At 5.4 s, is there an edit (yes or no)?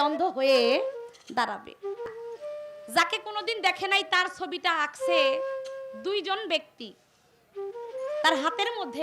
no